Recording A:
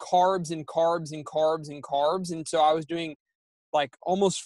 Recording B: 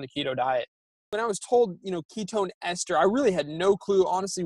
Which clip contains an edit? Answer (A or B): B